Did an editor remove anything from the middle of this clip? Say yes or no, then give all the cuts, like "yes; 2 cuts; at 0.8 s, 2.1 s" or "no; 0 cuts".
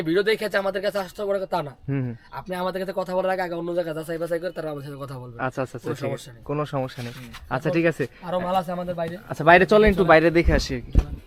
no; 0 cuts